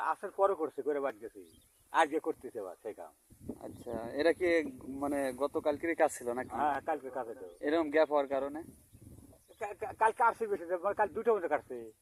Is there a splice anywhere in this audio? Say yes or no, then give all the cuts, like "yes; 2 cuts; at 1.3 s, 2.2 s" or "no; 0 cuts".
no; 0 cuts